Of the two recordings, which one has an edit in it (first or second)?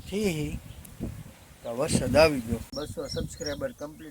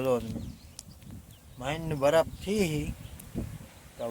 first